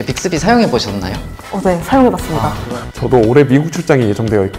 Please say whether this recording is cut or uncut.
cut